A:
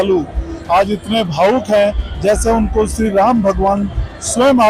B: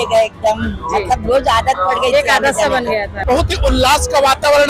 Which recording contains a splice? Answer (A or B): B